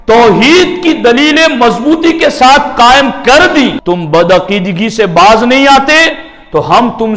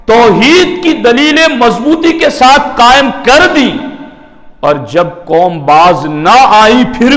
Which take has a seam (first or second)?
first